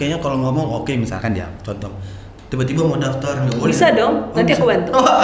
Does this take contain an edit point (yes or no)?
no